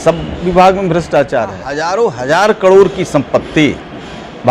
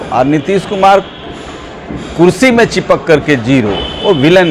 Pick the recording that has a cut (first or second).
first